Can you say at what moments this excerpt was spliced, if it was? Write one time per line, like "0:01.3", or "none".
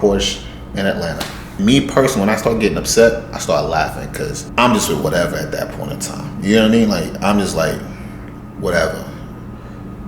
0:01.6
0:04.0